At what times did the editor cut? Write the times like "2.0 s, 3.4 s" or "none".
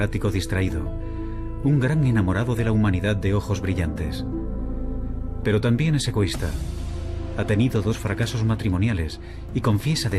none